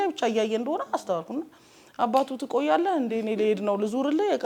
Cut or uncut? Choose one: uncut